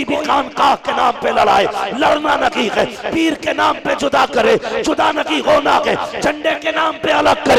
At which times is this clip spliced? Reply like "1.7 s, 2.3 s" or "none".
none